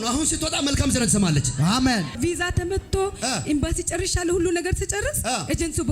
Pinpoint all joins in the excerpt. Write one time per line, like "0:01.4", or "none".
0:02.2